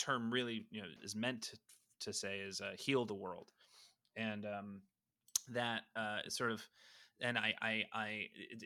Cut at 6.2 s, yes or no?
no